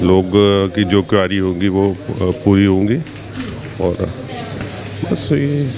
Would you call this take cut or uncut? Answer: uncut